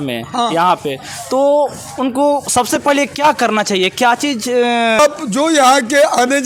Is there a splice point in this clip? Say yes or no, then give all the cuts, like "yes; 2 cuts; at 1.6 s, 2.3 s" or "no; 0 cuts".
no; 0 cuts